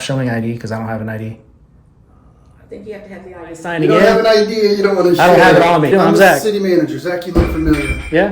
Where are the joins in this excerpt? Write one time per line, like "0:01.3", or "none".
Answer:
0:03.7
0:05.9